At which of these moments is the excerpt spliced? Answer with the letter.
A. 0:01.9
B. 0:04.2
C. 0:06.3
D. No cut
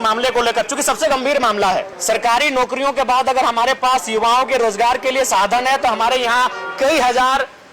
A